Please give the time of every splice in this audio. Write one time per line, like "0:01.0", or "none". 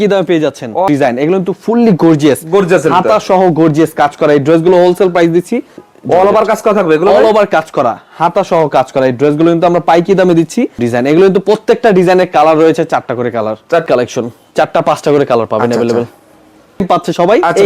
0:00.9
0:05.8
0:10.8
0:13.8
0:16.8